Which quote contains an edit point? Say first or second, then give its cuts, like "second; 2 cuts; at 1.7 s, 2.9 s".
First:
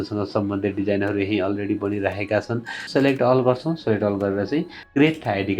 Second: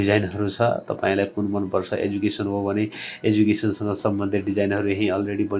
first; 1 cut; at 2.9 s